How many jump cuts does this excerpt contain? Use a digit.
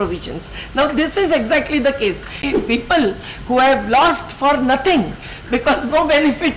1